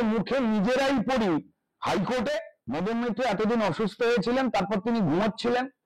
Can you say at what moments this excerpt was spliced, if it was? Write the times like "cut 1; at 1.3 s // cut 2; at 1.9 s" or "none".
cut 1; at 2.6 s